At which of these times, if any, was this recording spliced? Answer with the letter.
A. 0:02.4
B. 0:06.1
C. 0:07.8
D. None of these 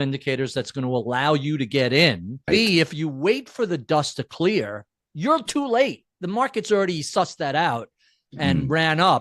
A